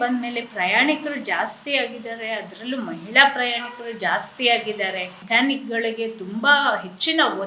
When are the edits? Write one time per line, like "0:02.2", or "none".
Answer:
0:05.2